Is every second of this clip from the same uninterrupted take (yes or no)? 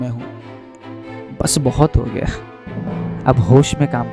yes